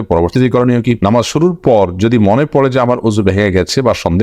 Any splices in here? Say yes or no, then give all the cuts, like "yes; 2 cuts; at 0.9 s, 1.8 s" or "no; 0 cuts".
yes; 1 cut; at 1.0 s